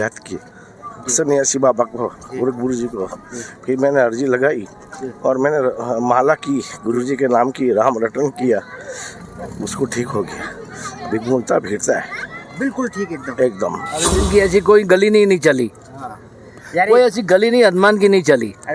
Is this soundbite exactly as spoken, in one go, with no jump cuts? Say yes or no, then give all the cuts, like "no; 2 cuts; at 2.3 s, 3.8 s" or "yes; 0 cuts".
no; 1 cut; at 14.3 s